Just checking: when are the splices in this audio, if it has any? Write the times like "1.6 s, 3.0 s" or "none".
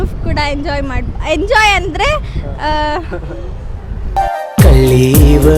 3.9 s